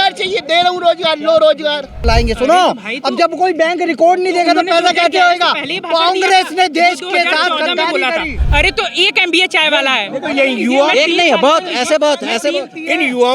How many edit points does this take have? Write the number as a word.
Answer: two